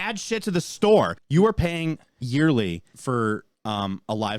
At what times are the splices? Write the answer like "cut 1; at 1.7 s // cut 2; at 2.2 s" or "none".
cut 1; at 1.2 s // cut 2; at 2.9 s // cut 3; at 3.5 s